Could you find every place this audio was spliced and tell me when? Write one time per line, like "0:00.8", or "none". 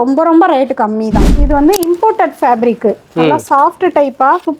0:01.3